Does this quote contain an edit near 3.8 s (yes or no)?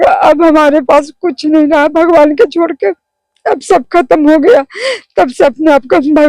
no